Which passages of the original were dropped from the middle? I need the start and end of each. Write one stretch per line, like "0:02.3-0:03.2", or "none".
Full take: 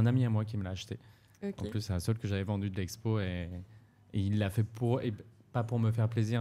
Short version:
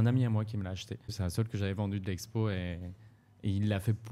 0:01.1-0:01.8